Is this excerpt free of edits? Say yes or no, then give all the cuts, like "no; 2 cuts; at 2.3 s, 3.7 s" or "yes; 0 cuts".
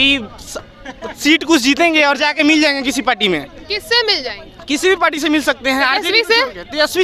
yes; 0 cuts